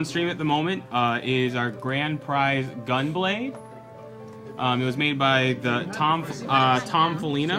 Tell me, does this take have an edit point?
yes; 1 cut; at 1.0 s

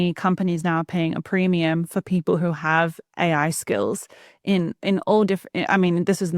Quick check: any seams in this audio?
no; 0 cuts

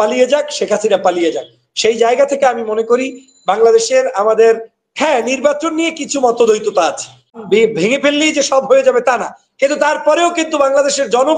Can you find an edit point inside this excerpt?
yes; 1 cut; at 7.4 s

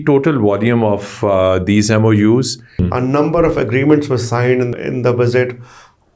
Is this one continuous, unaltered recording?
no; 2 cuts; at 2.8 s, 4.7 s

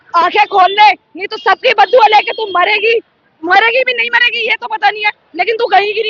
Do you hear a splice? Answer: no; 0 cuts

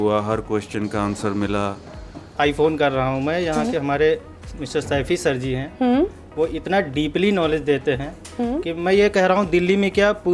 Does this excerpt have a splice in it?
yes; 1 cut; at 2.3 s

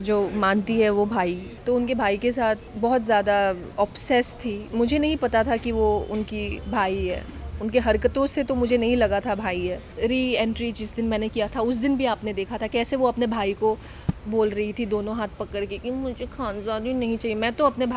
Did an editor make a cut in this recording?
yes; 4 cuts; at 1.5 s, 2.7 s, 4.6 s, 9.9 s

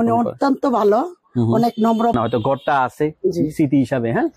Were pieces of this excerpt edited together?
yes; 1 cut; at 2.2 s

